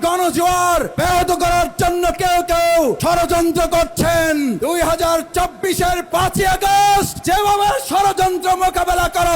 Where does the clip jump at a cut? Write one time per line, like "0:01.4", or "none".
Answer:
0:00.9
0:03.0
0:04.6
0:07.2

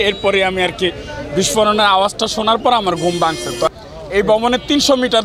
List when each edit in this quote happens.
0:03.7

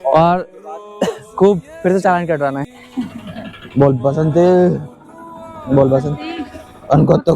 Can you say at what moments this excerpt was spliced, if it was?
0:02.6

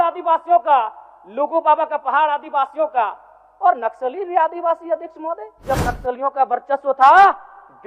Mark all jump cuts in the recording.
0:05.5

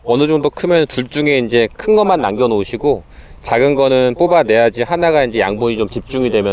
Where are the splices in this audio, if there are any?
none

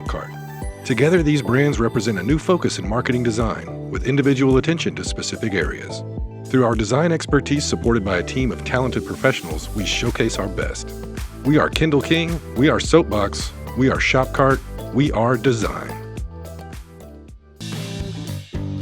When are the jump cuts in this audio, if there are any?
0:17.6

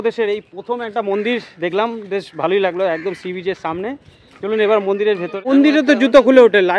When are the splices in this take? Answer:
0:05.5

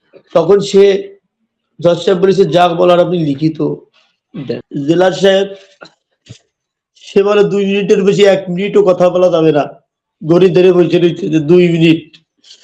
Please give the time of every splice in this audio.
0:04.6

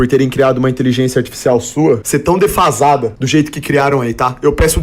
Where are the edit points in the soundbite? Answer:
0:02.0
0:03.2

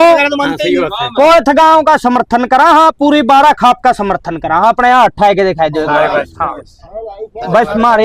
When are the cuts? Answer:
none

